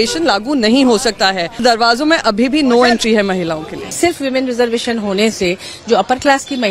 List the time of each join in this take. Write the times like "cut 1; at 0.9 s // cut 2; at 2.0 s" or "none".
cut 1; at 1.6 s // cut 2; at 4.0 s